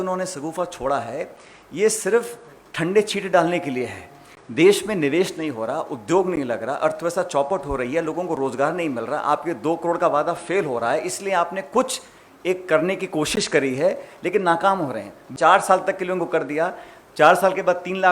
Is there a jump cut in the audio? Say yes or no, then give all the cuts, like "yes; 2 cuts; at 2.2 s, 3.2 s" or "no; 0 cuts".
yes; 1 cut; at 15.3 s